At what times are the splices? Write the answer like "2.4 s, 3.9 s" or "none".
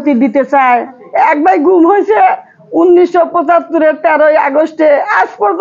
1.0 s